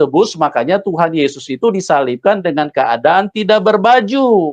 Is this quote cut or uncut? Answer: uncut